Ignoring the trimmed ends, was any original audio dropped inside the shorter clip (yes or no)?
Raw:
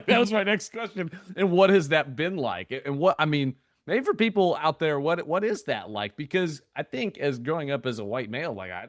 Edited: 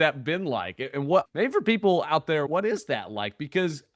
yes